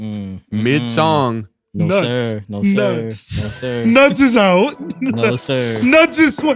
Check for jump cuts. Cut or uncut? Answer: uncut